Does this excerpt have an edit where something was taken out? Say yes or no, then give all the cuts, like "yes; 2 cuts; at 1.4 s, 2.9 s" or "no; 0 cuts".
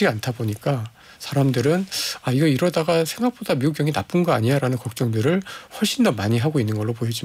no; 0 cuts